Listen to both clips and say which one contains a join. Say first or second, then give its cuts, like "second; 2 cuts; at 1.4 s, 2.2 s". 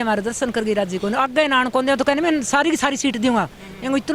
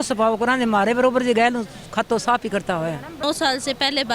second; 1 cut; at 3.2 s